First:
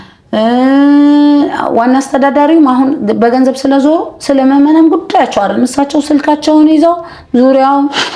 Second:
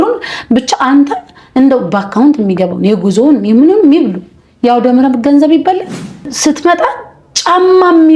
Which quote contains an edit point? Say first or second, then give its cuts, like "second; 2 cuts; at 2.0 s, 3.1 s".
second; 1 cut; at 6.3 s